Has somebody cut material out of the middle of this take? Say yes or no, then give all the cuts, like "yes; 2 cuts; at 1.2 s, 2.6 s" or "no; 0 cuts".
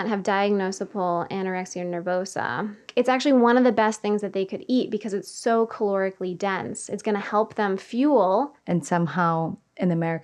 yes; 2 cuts; at 2.8 s, 8.5 s